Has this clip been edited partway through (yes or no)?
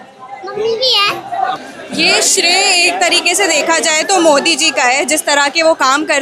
yes